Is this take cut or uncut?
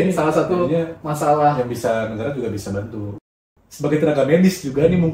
cut